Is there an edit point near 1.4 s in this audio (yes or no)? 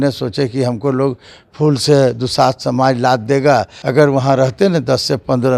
no